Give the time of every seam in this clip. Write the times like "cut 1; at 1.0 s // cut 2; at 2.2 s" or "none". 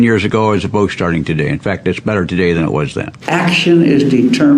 cut 1; at 3.1 s